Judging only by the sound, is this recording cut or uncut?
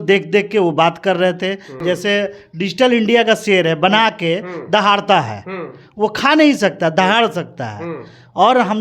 cut